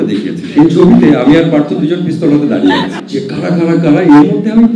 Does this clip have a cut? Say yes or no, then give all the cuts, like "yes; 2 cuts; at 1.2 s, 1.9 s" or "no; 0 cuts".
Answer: yes; 1 cut; at 3.0 s